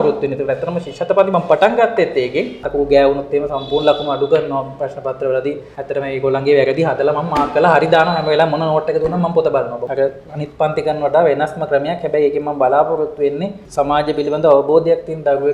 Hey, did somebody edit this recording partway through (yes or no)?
yes